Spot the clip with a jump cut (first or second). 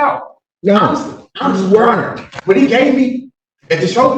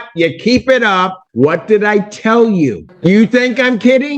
second